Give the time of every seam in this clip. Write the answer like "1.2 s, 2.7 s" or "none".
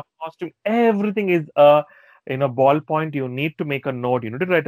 none